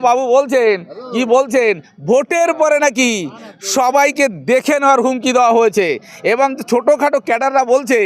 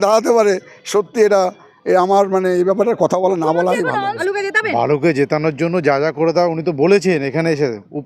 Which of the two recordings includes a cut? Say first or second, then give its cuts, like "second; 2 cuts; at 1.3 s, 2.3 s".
second; 1 cut; at 4.1 s